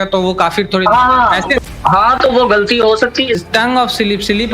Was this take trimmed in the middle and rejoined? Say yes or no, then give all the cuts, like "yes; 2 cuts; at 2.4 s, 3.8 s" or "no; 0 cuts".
yes; 2 cuts; at 1.5 s, 3.4 s